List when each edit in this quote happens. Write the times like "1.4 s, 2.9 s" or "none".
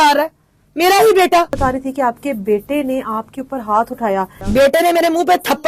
1.5 s, 4.4 s